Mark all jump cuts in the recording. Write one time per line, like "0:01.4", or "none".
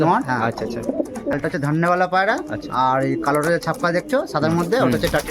0:01.3